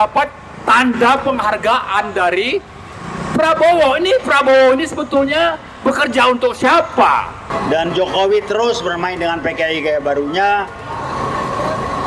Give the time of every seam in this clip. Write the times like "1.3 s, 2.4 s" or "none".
7.4 s